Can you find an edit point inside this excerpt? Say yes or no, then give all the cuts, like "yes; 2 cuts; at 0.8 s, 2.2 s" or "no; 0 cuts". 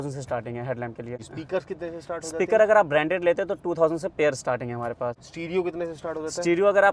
yes; 2 cuts; at 1.2 s, 5.3 s